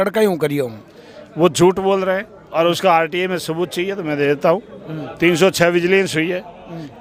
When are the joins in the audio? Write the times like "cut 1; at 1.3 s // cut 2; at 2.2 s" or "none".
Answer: none